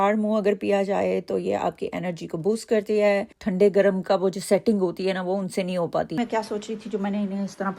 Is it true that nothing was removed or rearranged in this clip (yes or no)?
no